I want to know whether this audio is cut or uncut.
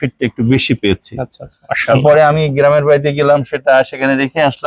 uncut